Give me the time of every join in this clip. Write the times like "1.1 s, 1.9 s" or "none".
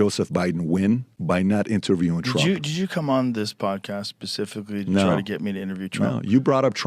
1.1 s